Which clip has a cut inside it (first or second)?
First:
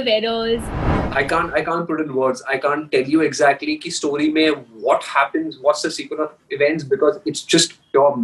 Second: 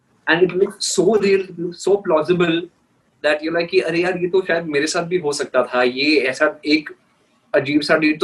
first